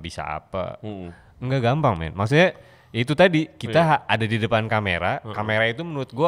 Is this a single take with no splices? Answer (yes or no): yes